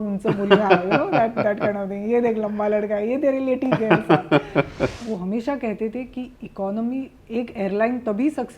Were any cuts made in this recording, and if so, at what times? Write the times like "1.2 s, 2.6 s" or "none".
5.0 s